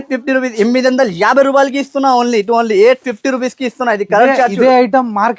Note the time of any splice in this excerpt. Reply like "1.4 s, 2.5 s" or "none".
none

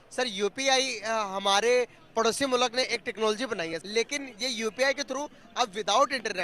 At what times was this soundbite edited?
3.8 s

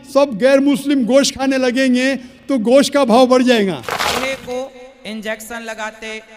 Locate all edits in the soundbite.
4.1 s

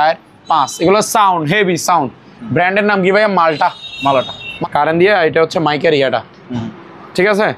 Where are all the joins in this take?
4.5 s

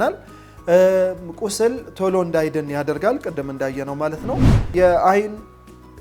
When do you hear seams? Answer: 4.7 s

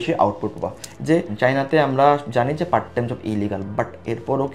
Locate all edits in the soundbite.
1.0 s

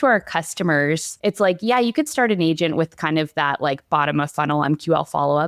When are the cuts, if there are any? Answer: 1.1 s

